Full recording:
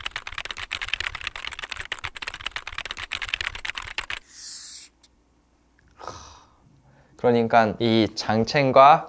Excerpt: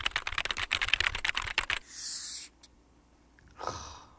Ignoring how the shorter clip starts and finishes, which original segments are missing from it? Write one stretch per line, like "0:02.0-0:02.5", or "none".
0:01.1-0:03.5